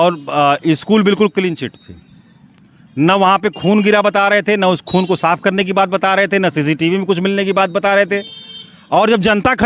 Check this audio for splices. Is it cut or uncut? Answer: uncut